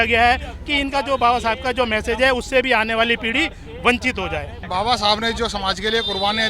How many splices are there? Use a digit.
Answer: 1